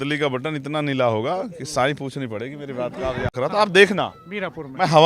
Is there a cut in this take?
yes; 1 cut; at 3.3 s

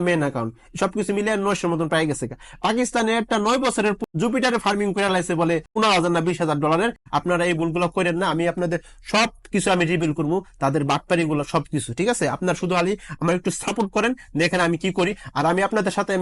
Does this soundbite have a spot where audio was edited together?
yes; 3 cuts; at 4.0 s, 5.7 s, 7.0 s

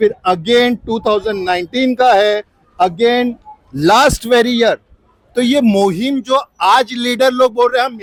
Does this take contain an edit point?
no; 0 cuts

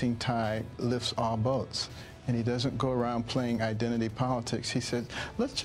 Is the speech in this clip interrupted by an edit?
no; 0 cuts

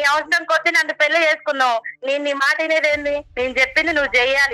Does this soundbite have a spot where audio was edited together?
yes; 2 cuts; at 1.9 s, 3.3 s

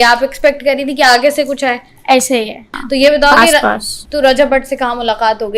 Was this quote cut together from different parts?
yes; 1 cut; at 2.6 s

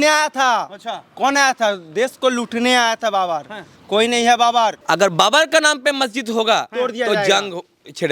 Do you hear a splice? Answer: yes; 1 cut; at 4.8 s

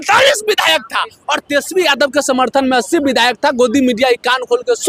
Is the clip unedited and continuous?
yes; 0 cuts

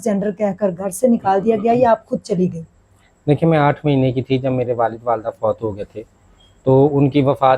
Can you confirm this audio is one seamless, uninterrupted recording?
yes; 0 cuts

